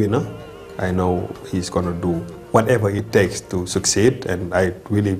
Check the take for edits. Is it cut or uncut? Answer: cut